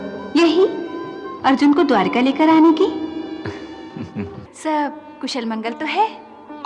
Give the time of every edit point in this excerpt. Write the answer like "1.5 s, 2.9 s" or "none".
4.4 s